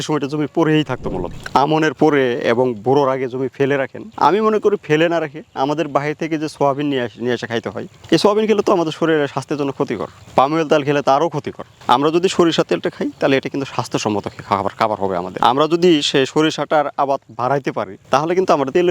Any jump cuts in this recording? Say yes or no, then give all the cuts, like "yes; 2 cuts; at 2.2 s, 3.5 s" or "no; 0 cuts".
yes; 1 cut; at 1.3 s